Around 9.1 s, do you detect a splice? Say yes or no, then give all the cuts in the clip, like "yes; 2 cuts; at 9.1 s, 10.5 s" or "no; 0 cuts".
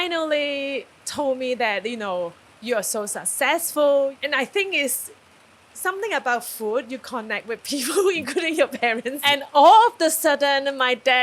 yes; 4 cuts; at 1.0 s, 2.5 s, 4.2 s, 9.1 s